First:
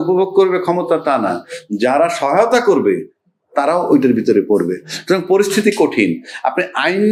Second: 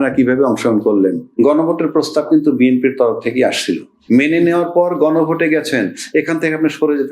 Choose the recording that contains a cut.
second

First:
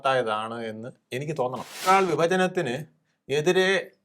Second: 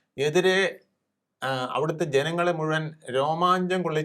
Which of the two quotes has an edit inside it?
first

